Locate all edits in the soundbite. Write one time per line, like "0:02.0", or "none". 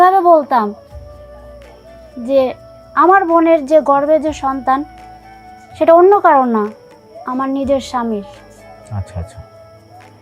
0:00.9
0:02.2